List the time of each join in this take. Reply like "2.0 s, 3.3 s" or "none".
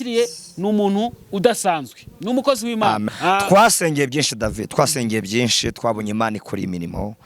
3.1 s

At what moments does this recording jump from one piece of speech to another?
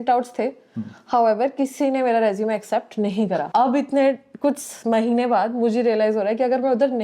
3.5 s

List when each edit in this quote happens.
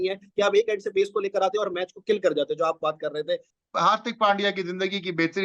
3.5 s

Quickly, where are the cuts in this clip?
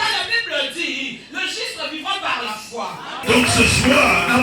3.2 s

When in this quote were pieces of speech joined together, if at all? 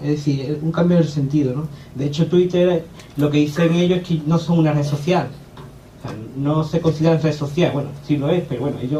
none

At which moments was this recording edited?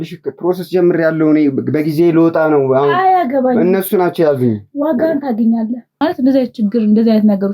6.0 s

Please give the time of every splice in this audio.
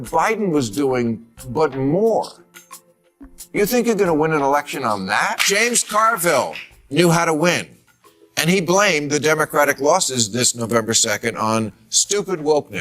5.5 s

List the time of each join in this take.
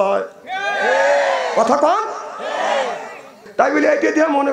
3.4 s

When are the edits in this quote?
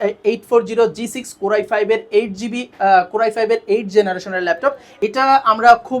4.9 s

